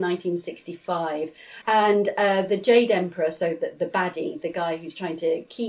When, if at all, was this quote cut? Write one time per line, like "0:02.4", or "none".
0:01.5